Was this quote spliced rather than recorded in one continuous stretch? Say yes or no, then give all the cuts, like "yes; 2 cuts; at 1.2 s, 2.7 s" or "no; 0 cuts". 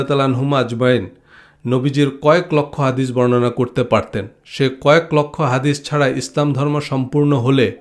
no; 0 cuts